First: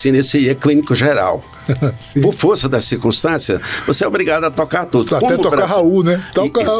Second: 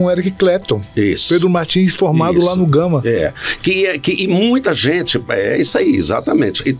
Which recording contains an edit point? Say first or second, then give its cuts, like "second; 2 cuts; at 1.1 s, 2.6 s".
first; 1 cut; at 2.0 s